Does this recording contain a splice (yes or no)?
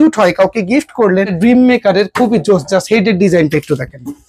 yes